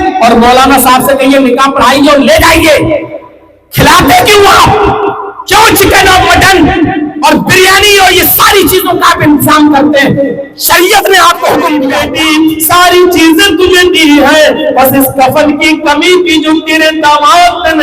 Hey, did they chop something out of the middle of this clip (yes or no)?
yes